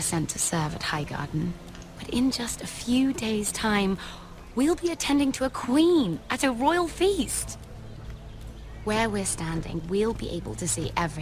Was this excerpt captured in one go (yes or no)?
no